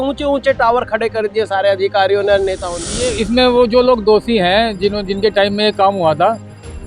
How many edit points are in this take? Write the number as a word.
one